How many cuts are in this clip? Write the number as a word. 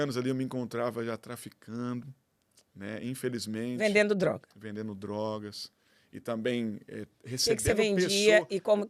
zero